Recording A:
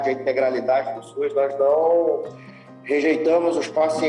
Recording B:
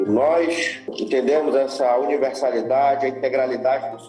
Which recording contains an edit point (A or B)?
B